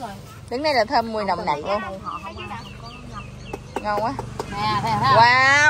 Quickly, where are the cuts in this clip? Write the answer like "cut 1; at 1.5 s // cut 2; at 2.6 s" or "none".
none